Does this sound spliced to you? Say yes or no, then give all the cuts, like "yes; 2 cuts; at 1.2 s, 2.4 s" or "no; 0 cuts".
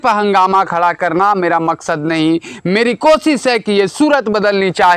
no; 0 cuts